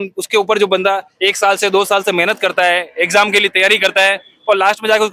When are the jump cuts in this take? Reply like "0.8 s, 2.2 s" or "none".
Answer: none